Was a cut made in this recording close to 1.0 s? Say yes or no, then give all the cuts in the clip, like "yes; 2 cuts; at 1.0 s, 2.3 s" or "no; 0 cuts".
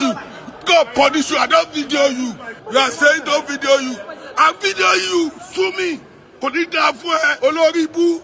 no; 2 cuts; at 2.5 s, 7.3 s